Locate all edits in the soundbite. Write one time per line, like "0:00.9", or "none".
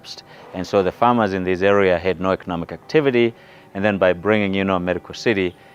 none

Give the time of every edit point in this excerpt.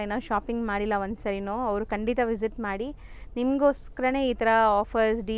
none

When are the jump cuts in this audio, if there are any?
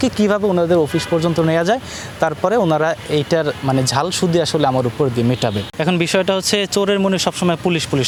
none

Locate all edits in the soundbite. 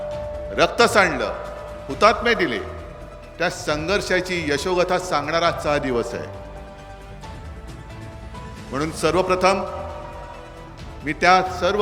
0:06.8
0:08.7

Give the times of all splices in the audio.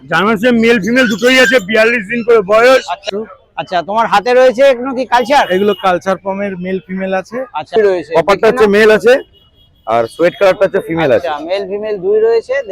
0:03.0
0:07.8

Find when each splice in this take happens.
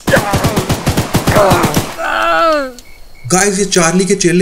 none

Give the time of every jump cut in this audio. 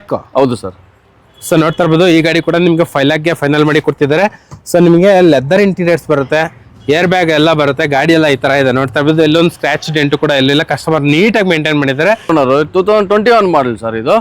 0:12.3

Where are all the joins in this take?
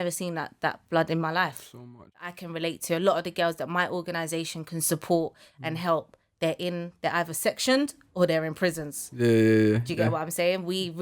0:02.3

